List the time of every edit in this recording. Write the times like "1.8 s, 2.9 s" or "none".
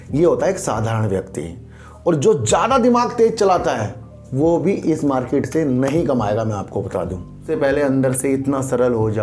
7.4 s